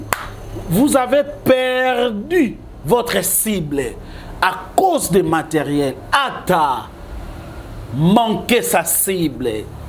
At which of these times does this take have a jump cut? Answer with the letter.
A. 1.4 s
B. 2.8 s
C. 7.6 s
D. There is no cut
D